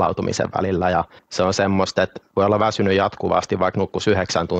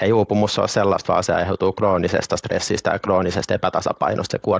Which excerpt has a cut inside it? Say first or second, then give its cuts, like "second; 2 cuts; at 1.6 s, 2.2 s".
first; 2 cuts; at 1.2 s, 2.2 s